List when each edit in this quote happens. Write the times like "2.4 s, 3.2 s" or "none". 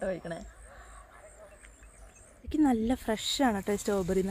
2.4 s